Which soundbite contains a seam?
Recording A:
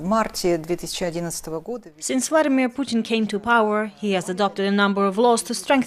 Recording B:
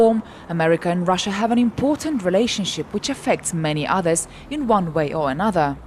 A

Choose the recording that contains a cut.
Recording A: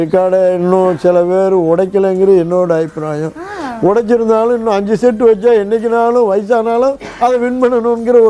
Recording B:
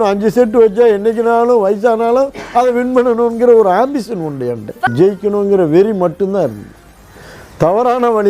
B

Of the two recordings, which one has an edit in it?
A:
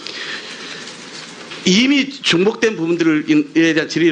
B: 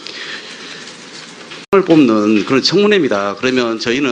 A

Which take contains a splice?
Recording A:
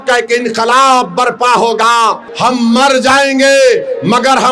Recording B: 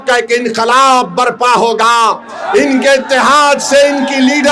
A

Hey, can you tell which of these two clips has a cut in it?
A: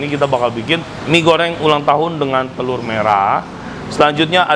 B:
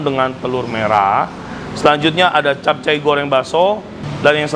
A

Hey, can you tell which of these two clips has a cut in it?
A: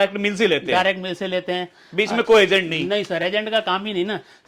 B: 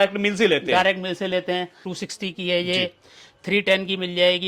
B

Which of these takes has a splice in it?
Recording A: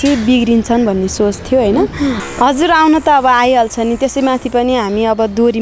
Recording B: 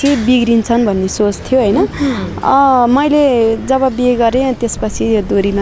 A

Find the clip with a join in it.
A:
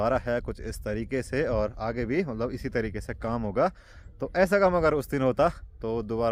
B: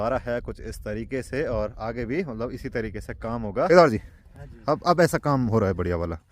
B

